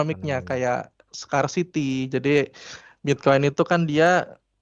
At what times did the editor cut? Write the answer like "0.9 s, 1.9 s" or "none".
none